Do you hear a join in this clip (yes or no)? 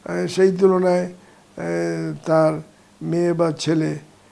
no